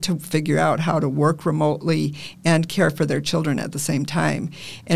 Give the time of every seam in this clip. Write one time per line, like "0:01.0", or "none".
none